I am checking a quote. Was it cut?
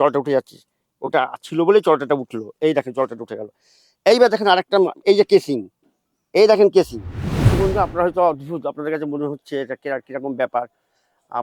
yes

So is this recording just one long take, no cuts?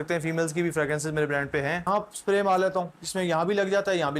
no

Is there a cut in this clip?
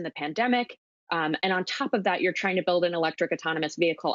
no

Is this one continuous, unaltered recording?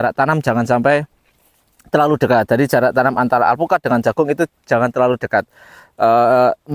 yes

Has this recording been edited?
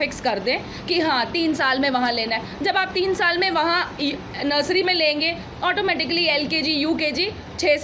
no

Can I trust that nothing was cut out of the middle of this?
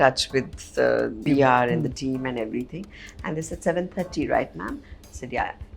no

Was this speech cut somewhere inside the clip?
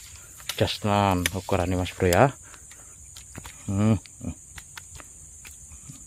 no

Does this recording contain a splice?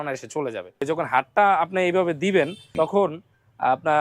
yes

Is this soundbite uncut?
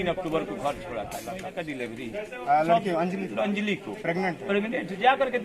no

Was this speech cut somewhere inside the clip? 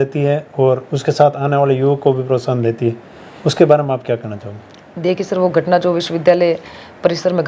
no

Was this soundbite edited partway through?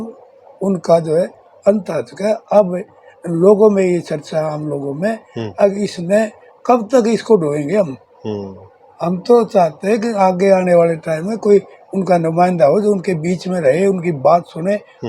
no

